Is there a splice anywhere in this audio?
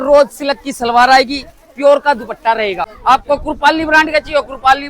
yes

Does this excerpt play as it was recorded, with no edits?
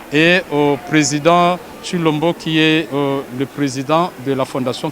yes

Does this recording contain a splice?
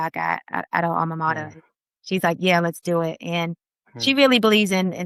no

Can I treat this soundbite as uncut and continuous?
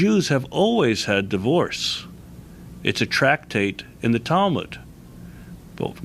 no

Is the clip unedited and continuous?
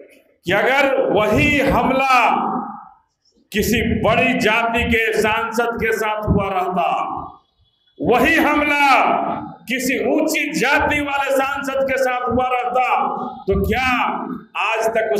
yes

